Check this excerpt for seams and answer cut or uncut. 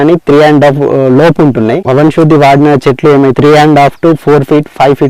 cut